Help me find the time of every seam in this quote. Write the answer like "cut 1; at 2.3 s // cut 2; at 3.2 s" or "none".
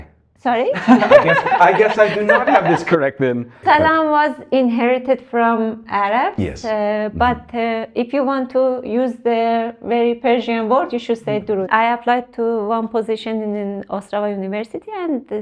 cut 1; at 3.6 s // cut 2; at 11.7 s

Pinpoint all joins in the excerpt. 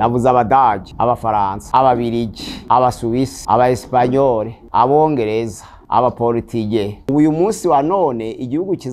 cut 1; at 7.0 s

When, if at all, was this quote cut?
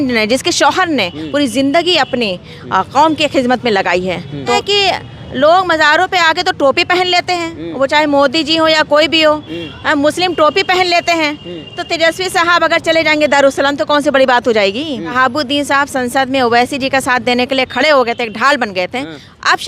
cut 1; at 4.5 s // cut 2; at 15.1 s

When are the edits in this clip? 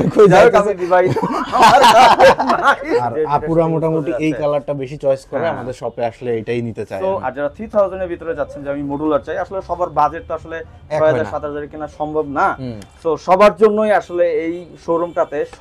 cut 1; at 2.9 s // cut 2; at 7.2 s

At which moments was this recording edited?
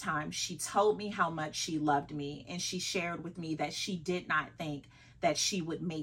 none

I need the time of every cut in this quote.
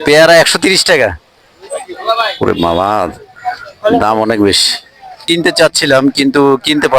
cut 1; at 5.2 s

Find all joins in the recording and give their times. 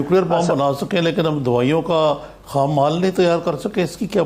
none

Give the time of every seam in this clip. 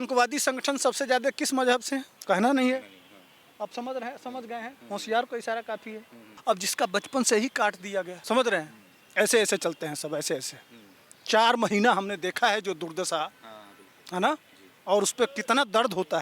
cut 1; at 2.1 s // cut 2; at 6.3 s // cut 3; at 8.2 s

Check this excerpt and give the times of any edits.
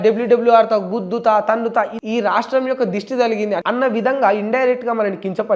cut 1; at 1.9 s // cut 2; at 3.6 s

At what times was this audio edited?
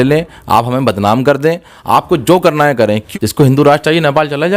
cut 1; at 3.0 s

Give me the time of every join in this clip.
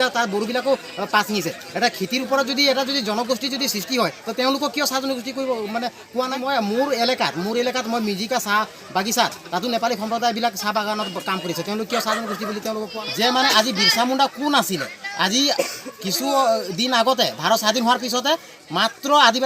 cut 1; at 6.4 s // cut 2; at 13.0 s

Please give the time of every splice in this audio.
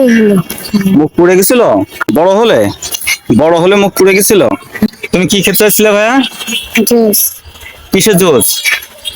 cut 1; at 2.1 s // cut 2; at 4.9 s

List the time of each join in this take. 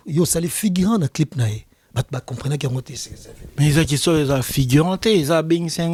none

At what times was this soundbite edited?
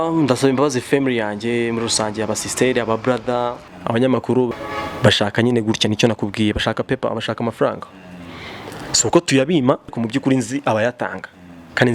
cut 1; at 3.7 s // cut 2; at 4.6 s // cut 3; at 9.9 s

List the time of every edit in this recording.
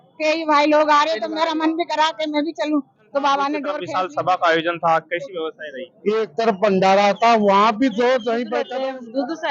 cut 1; at 3.7 s // cut 2; at 8.6 s

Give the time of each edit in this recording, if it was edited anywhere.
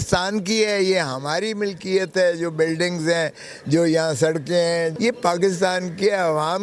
cut 1; at 4.9 s

